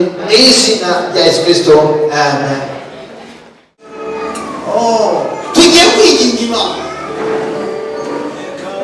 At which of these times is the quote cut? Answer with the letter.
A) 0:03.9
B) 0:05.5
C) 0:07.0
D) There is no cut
A